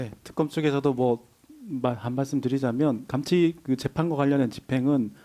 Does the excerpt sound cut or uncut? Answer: cut